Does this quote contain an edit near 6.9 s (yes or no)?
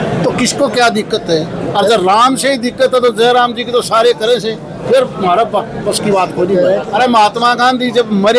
yes